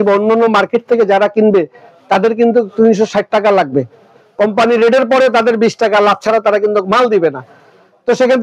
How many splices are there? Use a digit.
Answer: 0